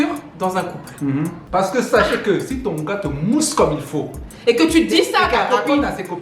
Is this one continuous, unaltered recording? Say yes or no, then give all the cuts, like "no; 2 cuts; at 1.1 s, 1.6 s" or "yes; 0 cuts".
no; 1 cut; at 1.4 s